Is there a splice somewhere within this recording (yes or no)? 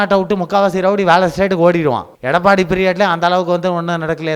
yes